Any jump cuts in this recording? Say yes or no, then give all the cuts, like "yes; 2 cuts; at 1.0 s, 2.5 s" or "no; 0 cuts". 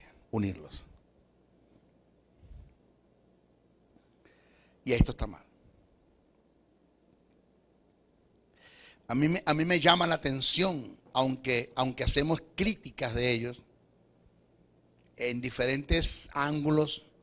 no; 0 cuts